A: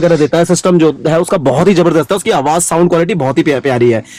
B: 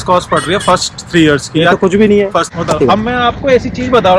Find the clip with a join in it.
B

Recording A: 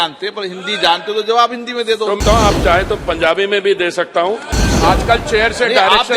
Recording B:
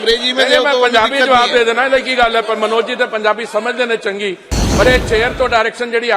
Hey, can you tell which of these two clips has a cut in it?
A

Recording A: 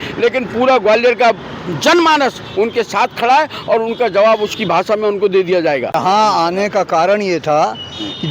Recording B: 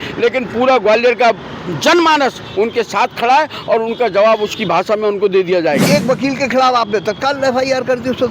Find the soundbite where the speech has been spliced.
B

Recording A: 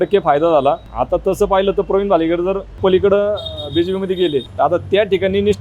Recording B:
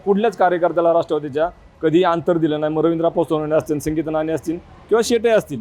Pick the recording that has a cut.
A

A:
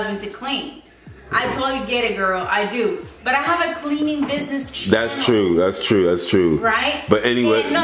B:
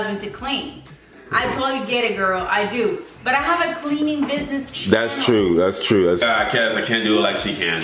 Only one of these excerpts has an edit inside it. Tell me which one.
B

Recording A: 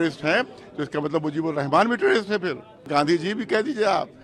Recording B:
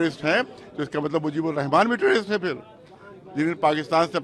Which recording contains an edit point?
A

